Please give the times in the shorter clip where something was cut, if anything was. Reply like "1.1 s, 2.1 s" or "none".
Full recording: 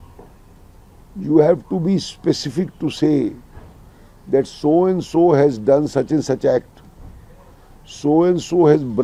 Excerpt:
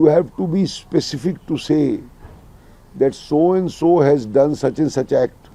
none